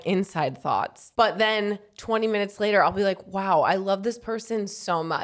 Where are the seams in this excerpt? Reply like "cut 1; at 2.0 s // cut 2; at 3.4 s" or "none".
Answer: cut 1; at 1.0 s